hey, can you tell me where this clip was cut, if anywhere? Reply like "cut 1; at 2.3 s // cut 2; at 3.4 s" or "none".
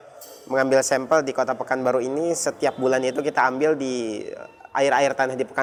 none